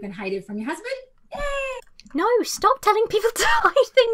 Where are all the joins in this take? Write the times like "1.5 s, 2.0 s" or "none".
none